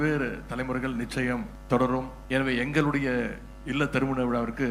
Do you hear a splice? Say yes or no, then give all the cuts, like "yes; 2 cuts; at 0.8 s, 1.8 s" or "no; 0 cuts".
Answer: yes; 2 cuts; at 1.5 s, 2.2 s